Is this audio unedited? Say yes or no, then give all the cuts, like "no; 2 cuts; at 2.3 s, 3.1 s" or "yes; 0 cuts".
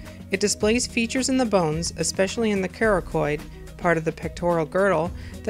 no; 1 cut; at 1.3 s